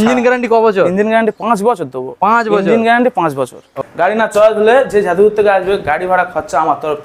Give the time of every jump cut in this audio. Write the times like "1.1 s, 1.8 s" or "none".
3.8 s